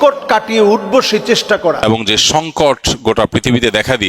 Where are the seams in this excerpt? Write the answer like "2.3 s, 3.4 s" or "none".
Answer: 1.8 s